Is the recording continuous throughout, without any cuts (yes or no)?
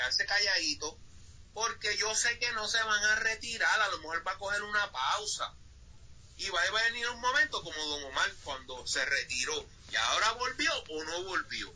yes